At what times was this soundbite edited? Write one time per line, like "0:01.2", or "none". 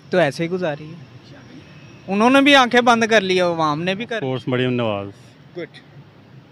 0:04.1